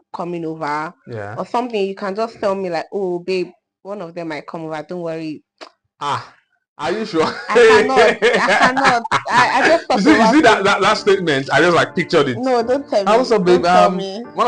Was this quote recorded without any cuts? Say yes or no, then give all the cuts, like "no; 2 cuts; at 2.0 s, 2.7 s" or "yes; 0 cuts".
yes; 0 cuts